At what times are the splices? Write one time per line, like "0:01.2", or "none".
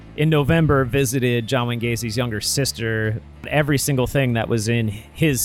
0:03.5